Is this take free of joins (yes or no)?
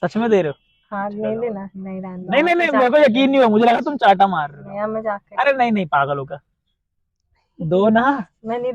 yes